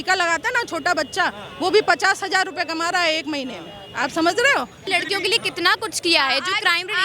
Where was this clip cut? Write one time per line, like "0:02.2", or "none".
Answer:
0:04.8